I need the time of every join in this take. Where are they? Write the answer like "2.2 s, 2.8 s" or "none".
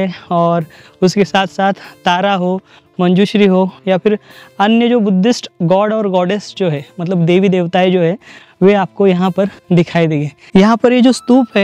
10.3 s